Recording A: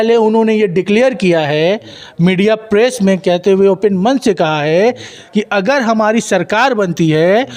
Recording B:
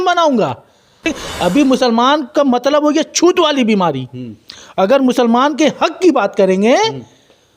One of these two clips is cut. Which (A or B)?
B